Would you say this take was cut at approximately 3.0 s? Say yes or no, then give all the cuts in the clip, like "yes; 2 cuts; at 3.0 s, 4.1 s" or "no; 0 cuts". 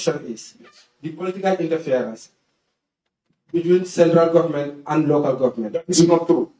no; 0 cuts